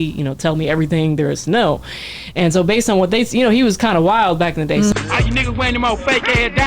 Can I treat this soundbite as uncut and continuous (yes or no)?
yes